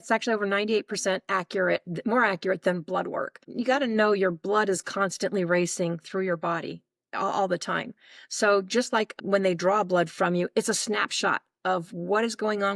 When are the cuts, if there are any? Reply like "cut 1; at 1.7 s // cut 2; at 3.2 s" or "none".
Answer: cut 1; at 3.4 s // cut 2; at 9.2 s